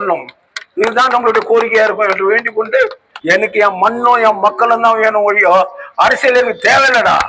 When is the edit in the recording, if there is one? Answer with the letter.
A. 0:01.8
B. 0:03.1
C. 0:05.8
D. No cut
B